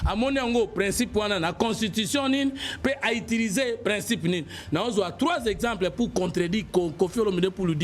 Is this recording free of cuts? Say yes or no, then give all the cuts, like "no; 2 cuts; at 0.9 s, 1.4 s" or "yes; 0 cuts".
yes; 0 cuts